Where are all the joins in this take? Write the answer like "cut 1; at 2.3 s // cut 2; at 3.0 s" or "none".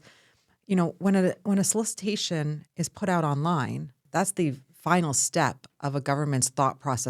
cut 1; at 4.0 s